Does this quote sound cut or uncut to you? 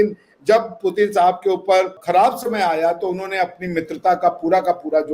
cut